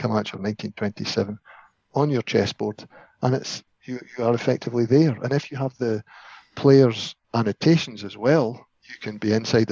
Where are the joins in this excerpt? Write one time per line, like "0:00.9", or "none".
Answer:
none

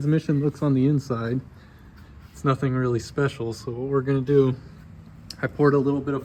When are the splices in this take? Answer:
none

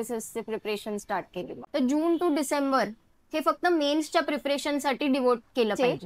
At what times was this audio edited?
0:01.5

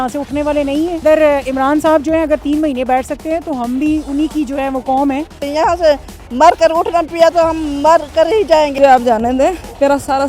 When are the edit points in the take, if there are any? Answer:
0:01.0
0:05.4
0:08.7

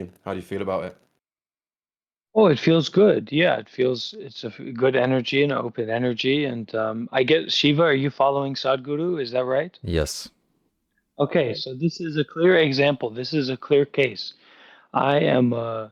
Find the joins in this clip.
none

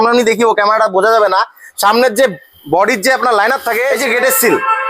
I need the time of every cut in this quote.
0:03.9

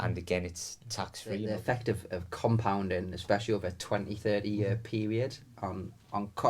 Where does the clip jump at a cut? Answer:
0:01.4

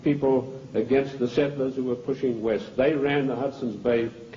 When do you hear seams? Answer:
0:01.0

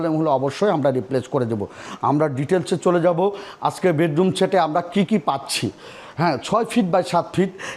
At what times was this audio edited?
none

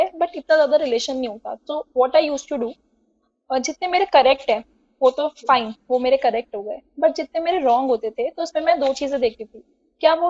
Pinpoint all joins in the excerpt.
none

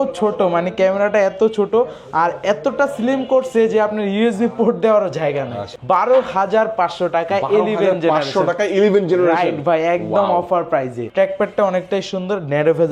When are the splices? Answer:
0:05.7
0:11.0

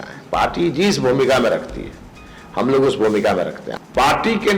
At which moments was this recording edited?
0:03.6

